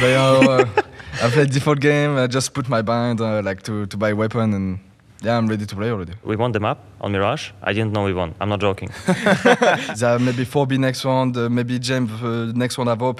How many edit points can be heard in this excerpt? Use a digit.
2